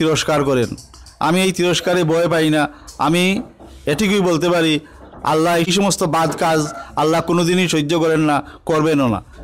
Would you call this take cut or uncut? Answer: cut